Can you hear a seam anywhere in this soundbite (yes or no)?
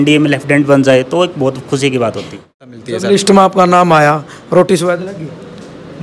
yes